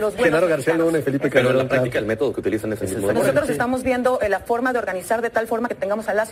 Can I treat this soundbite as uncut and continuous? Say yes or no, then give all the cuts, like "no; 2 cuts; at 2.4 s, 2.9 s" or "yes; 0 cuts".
yes; 0 cuts